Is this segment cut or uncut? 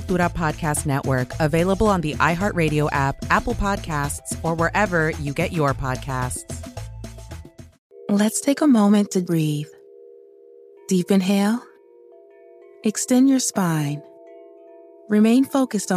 cut